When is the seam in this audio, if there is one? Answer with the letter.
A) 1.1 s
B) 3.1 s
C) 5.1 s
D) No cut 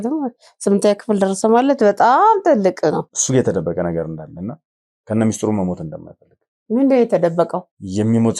B